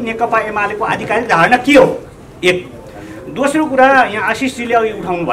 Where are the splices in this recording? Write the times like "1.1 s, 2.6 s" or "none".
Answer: none

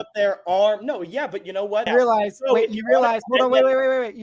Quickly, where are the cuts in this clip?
1.9 s

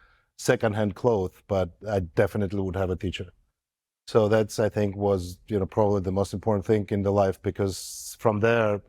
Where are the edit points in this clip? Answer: none

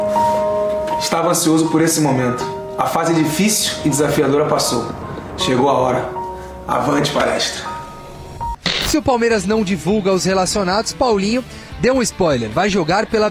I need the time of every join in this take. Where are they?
none

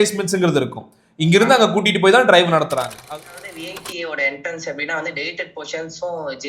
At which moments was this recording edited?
3.0 s

